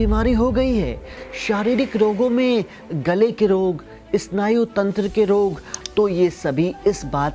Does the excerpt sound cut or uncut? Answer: cut